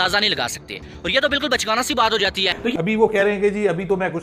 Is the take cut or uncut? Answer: uncut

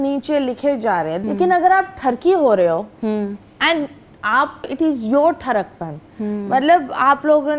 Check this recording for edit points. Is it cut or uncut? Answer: cut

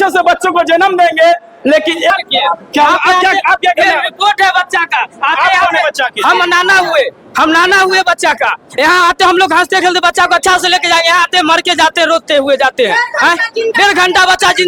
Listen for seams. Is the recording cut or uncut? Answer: cut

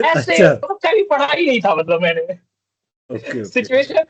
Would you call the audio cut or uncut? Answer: uncut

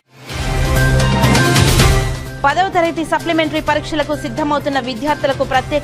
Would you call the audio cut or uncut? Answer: cut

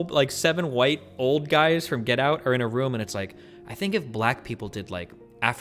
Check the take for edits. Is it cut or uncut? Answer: uncut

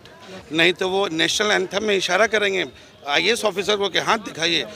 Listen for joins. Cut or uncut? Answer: uncut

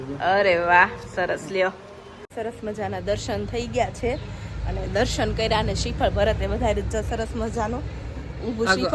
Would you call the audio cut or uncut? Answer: cut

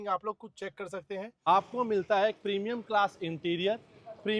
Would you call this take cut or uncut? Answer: cut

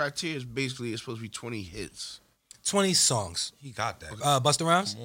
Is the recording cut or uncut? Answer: cut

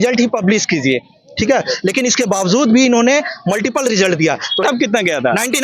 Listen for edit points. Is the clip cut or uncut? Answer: cut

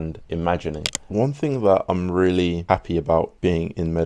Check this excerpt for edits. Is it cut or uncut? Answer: cut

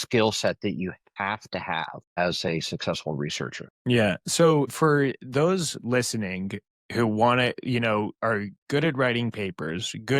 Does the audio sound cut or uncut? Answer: cut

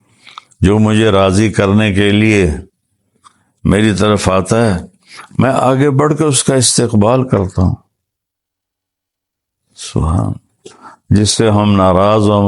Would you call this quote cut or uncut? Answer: uncut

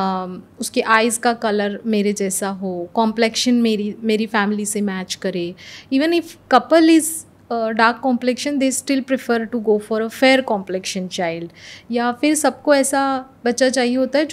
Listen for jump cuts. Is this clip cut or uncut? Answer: uncut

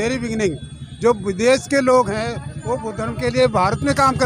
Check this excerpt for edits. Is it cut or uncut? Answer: uncut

